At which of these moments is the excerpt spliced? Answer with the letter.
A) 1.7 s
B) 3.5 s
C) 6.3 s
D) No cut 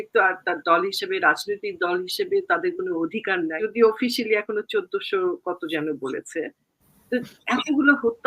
B